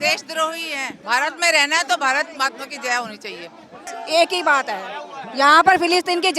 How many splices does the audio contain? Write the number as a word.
two